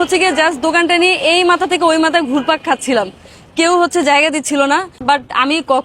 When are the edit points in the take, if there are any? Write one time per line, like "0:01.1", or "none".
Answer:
0:04.9